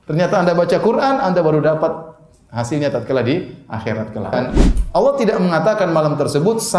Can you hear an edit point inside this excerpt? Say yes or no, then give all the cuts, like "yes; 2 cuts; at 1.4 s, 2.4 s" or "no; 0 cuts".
yes; 1 cut; at 4.3 s